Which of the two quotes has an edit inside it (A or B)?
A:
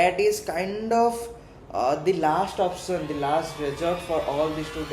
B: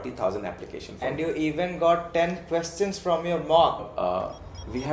B